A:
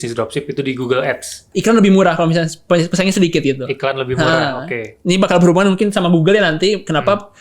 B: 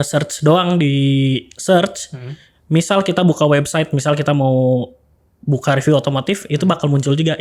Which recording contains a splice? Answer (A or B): A